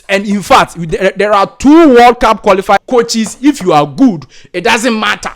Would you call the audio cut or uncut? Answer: cut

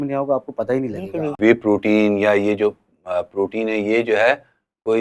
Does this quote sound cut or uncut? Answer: cut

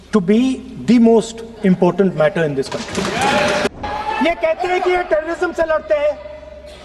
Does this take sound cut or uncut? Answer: cut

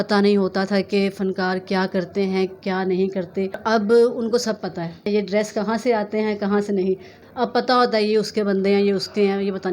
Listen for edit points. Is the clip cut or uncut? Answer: cut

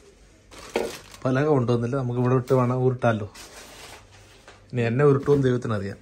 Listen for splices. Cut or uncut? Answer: uncut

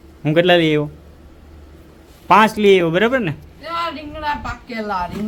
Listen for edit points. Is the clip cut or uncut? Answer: uncut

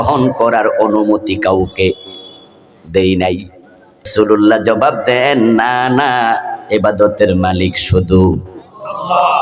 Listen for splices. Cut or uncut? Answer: cut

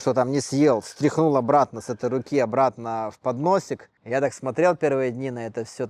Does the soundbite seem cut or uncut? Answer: cut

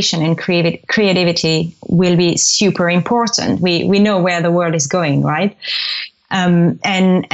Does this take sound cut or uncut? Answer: uncut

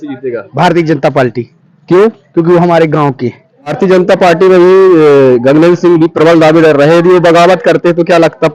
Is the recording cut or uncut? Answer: cut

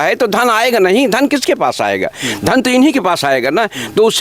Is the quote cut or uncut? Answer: uncut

